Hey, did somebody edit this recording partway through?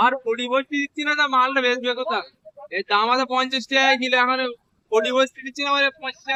no; 0 cuts

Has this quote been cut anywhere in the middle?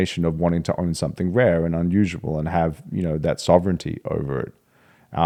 no; 0 cuts

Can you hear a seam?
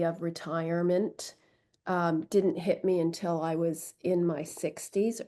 no; 0 cuts

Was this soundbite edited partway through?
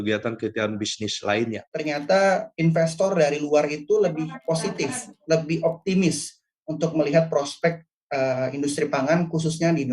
yes; 1 cut; at 1.7 s

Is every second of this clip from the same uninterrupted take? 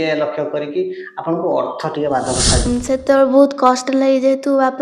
no; 1 cut; at 2.7 s

